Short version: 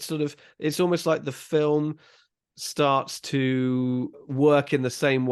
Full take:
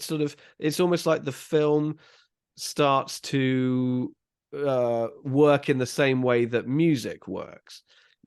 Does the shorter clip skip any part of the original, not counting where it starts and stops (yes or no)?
yes